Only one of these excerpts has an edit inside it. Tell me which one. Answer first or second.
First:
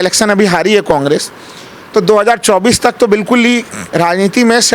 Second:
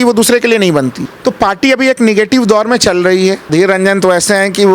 second